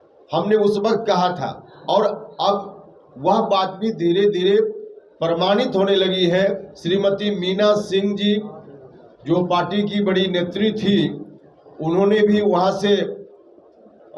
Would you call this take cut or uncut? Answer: cut